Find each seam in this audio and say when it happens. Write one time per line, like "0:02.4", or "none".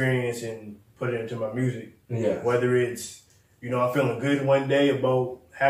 none